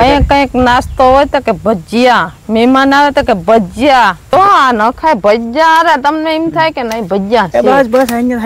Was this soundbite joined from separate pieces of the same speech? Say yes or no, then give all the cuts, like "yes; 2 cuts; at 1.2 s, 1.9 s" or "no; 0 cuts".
yes; 1 cut; at 4.3 s